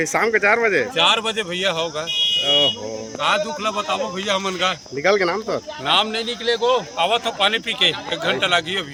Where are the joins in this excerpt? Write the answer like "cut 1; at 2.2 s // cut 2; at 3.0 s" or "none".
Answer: none